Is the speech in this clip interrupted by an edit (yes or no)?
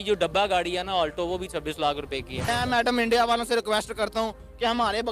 yes